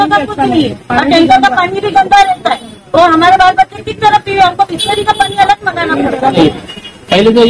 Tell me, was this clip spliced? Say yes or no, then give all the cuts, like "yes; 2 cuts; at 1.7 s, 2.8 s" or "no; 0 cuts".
yes; 1 cut; at 6.3 s